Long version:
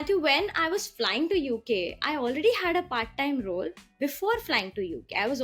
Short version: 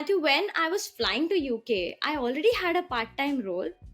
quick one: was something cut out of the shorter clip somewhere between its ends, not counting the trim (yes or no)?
no